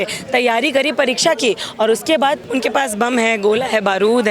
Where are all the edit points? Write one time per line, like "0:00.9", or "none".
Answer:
0:02.4